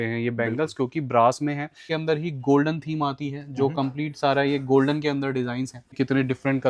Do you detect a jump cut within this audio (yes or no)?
yes